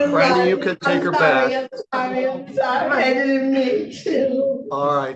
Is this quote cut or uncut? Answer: uncut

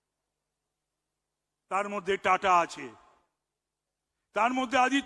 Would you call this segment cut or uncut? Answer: uncut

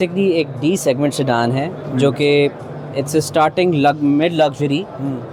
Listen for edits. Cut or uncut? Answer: uncut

